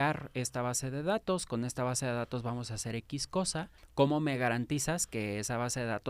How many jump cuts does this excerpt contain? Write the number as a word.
one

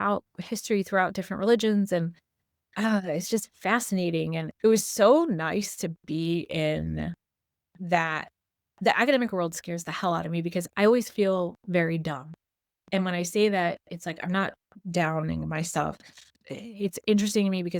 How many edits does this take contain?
two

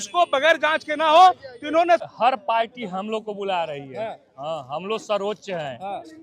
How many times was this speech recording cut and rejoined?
one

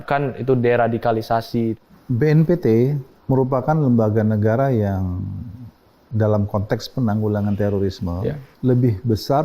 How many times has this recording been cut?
three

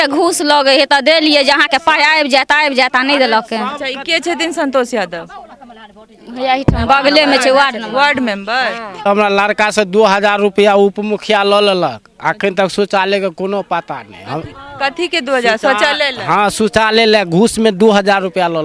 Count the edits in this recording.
one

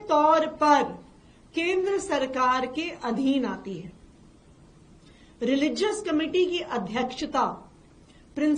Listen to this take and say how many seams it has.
zero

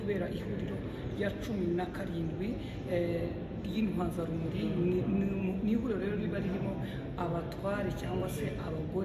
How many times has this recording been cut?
zero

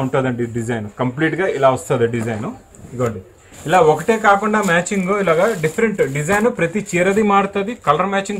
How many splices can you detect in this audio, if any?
zero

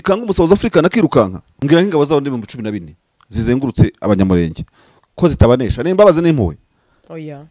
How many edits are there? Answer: one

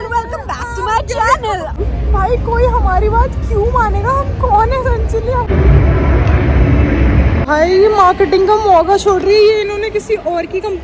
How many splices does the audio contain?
three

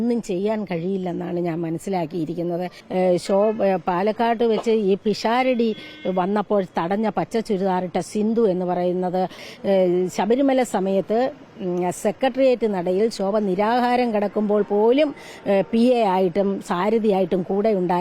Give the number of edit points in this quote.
two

